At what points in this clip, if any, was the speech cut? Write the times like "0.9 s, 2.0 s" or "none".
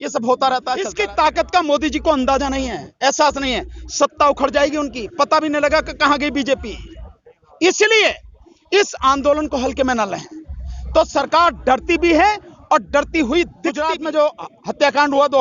0.9 s, 13.8 s